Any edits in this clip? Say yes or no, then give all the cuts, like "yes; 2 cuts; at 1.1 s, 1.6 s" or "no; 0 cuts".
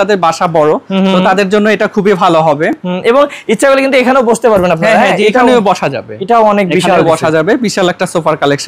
no; 0 cuts